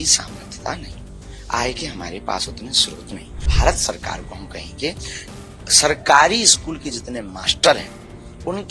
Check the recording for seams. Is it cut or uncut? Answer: cut